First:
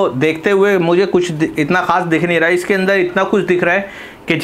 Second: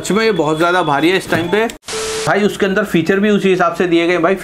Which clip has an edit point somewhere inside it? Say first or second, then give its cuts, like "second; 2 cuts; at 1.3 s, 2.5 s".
second; 1 cut; at 2.2 s